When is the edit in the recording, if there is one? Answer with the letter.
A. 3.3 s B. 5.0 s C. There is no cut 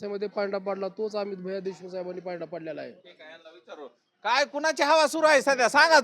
C